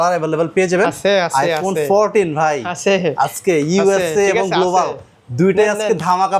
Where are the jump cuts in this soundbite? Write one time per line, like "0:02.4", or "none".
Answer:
none